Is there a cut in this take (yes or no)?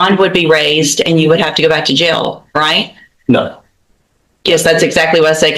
no